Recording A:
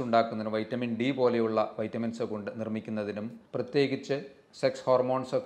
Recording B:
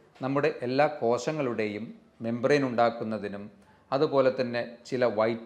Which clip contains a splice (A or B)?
A